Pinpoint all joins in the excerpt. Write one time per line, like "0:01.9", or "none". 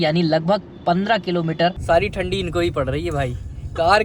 0:01.8